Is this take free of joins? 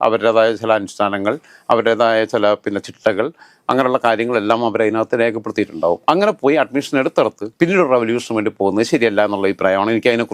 yes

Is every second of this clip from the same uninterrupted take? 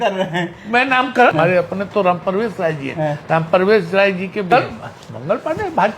no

